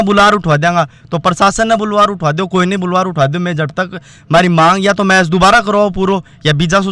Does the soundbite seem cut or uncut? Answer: uncut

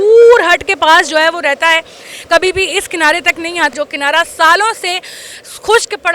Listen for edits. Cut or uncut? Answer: cut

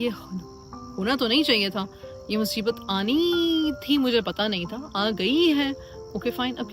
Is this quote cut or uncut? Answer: uncut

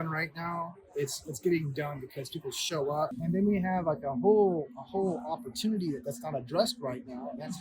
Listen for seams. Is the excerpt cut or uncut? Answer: cut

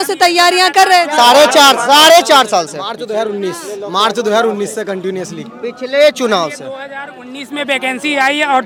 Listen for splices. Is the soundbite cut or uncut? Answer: uncut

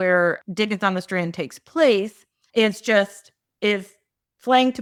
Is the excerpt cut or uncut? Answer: uncut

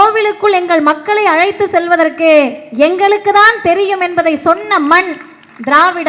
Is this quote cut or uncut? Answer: uncut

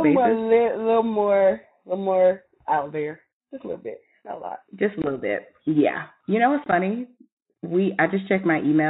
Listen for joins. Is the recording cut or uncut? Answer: uncut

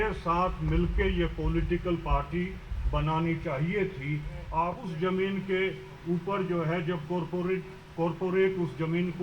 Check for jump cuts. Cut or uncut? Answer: cut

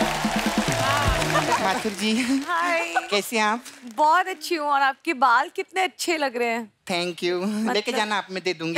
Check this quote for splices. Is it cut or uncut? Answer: cut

